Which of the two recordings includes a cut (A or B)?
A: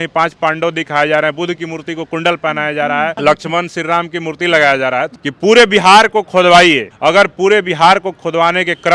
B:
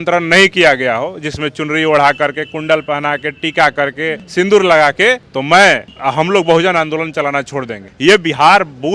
A